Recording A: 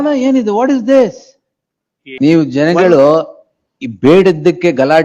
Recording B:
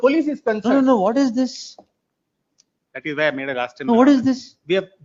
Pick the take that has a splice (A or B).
A